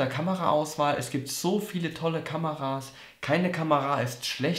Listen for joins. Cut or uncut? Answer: uncut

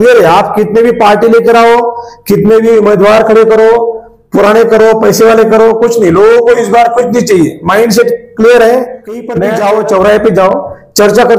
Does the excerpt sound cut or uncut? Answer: cut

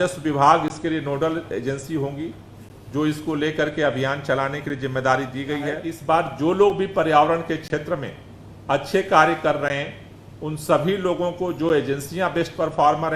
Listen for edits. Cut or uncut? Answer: cut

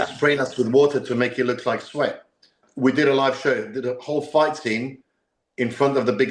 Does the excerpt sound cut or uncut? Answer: cut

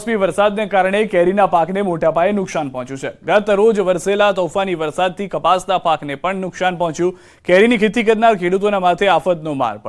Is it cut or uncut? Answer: uncut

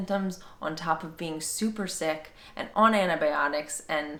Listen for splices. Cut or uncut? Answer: uncut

